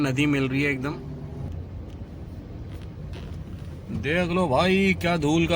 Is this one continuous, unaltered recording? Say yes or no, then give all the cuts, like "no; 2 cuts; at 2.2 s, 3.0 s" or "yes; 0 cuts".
no; 1 cut; at 1.5 s